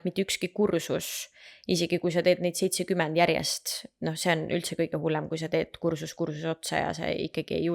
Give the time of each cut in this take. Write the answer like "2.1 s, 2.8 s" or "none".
none